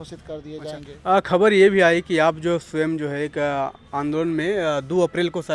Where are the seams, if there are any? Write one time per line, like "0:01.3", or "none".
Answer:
none